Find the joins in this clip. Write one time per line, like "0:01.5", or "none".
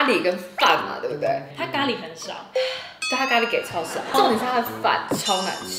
none